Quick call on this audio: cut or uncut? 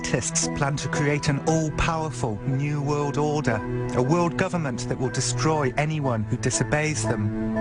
uncut